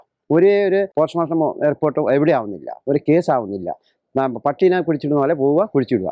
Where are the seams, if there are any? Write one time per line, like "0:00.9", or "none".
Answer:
0:00.9